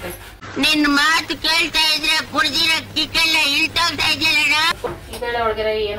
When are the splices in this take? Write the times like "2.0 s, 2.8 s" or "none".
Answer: 4.9 s